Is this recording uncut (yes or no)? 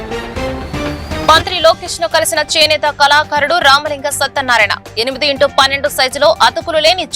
no